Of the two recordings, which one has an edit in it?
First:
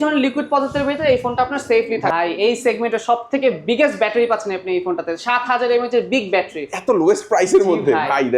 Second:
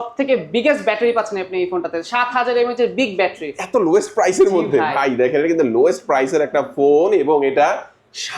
first; 1 cut; at 2.1 s

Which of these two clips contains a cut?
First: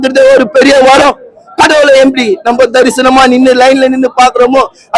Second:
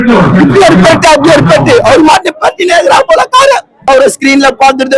second; 1 cut; at 3.7 s

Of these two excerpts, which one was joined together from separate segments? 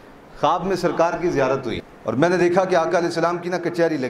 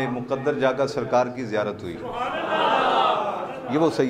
first; 1 cut; at 1.9 s

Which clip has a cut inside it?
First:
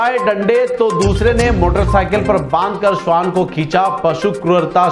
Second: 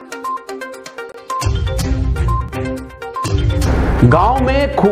second; 1 cut; at 1.0 s

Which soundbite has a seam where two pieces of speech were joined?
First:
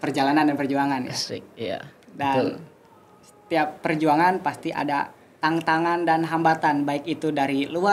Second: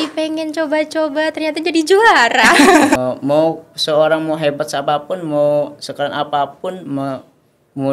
second; 1 cut; at 3.0 s

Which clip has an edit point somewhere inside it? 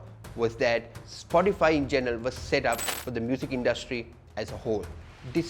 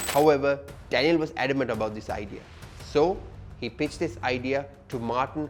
first; 1 cut; at 3.0 s

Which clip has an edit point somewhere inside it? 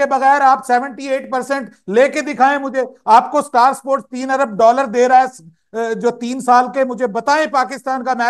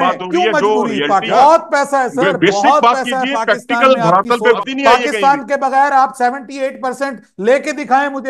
second; 2 cuts; at 1.3 s, 4.6 s

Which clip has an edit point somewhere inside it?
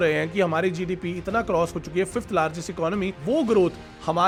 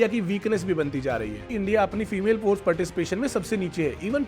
second; 1 cut; at 1.6 s

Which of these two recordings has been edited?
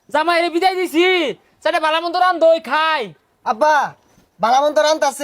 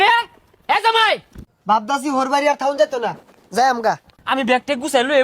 second; 2 cuts; at 1.4 s, 4.1 s

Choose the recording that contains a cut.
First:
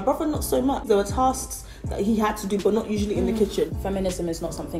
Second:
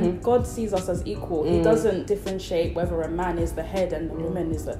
first; 2 cuts; at 0.9 s, 3.7 s

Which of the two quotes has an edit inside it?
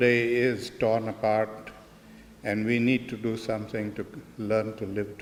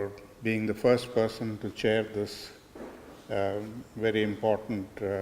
second; 1 cut; at 1.1 s

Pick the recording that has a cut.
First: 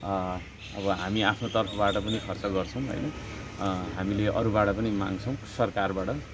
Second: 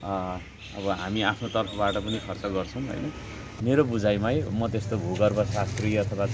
second; 1 cut; at 3.4 s

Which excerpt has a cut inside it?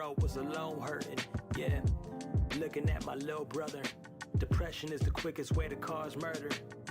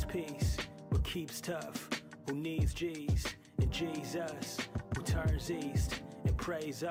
first; 1 cut; at 1.6 s

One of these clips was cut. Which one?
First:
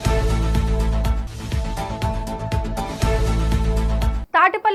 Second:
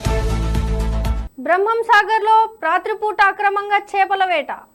second; 1 cut; at 1.2 s

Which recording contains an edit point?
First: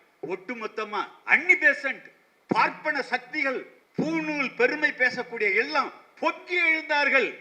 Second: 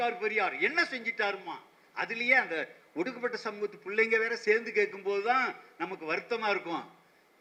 first; 2 cuts; at 1.2 s, 3.8 s

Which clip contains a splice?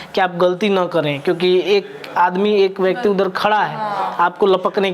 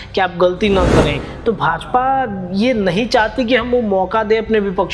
second; 1 cut; at 1.2 s

